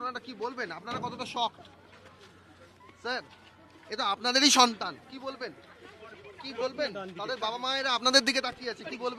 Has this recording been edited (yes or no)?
no